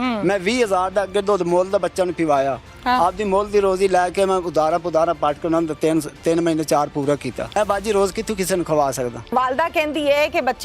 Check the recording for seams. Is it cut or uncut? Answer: cut